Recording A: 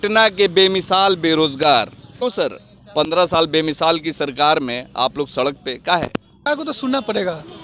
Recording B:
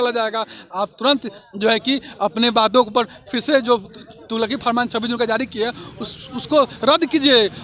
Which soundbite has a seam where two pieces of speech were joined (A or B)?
A